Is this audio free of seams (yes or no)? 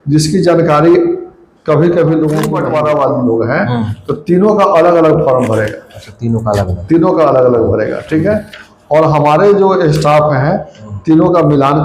no